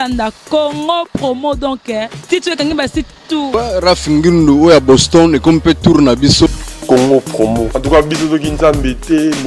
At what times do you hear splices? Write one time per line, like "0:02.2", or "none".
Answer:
0:03.5
0:06.7